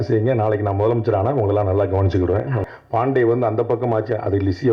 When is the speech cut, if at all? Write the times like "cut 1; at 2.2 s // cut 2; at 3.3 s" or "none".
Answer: cut 1; at 2.8 s